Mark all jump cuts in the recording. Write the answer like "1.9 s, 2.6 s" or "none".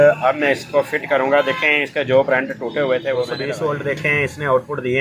3.3 s